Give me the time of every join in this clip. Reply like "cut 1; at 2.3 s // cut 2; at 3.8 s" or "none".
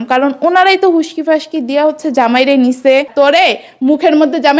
cut 1; at 3.1 s